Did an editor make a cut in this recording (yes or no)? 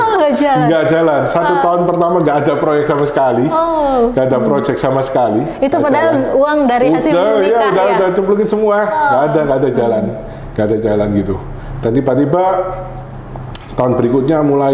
no